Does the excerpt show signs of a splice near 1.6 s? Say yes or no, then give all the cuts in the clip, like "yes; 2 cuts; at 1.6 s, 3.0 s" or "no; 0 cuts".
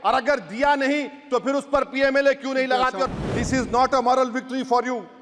no; 1 cut; at 3.2 s